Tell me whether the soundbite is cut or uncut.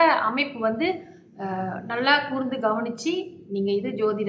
uncut